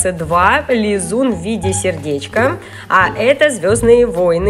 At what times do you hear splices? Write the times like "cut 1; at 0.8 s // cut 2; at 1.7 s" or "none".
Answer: none